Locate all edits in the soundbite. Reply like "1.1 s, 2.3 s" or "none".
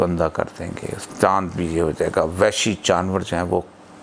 0.9 s